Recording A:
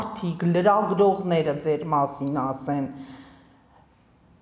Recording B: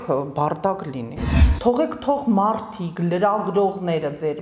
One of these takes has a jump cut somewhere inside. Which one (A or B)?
B